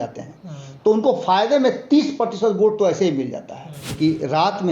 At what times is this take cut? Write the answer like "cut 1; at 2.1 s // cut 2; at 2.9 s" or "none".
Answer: cut 1; at 3.8 s